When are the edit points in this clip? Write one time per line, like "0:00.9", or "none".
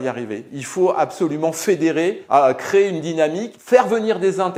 none